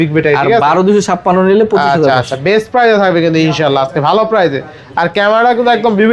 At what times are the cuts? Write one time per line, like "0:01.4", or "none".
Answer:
none